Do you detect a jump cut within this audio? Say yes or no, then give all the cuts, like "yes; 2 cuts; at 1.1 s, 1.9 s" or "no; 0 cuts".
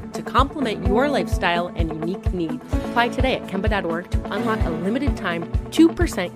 no; 0 cuts